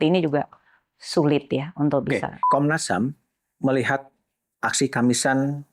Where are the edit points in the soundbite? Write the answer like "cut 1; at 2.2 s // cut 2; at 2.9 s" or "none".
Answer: cut 1; at 2.4 s